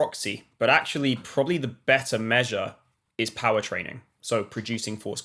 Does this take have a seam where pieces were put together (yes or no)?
no